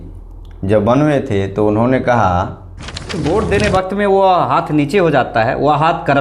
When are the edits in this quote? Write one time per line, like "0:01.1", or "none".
0:03.2